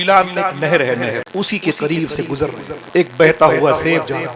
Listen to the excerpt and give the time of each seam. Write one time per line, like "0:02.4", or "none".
0:01.2
0:02.7